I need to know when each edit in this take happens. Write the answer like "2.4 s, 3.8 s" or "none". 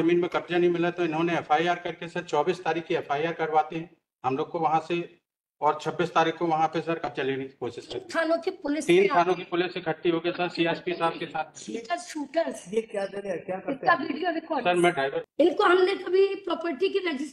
15.3 s